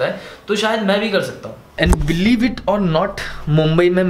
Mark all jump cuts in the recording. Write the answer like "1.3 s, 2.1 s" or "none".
1.6 s

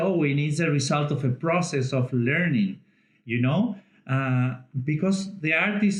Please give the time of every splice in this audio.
none

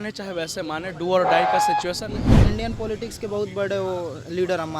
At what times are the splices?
2.4 s

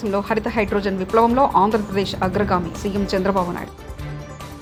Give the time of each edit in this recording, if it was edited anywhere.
none

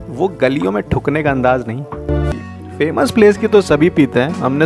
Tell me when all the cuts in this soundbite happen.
2.3 s

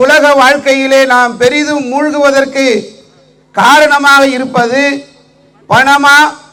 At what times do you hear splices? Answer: none

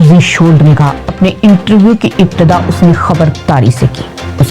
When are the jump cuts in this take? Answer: 1.0 s

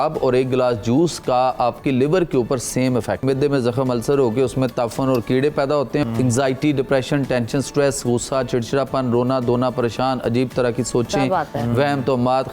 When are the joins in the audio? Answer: 3.2 s, 6.0 s

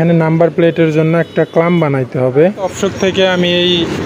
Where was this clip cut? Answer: 2.7 s

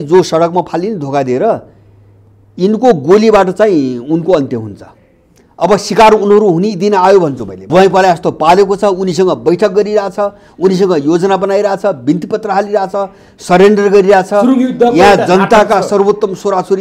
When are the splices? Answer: 7.6 s

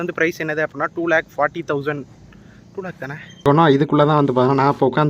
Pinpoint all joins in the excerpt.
3.4 s

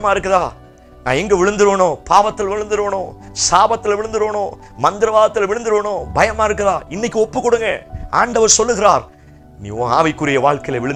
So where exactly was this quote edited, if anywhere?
none

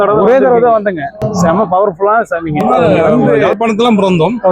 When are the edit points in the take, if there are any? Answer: 1.3 s, 3.5 s

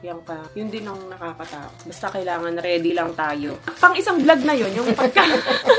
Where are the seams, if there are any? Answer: 1.8 s, 3.7 s

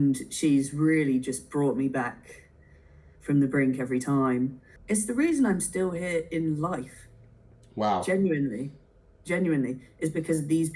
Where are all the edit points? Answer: 4.7 s

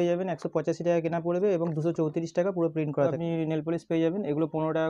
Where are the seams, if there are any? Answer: 3.1 s

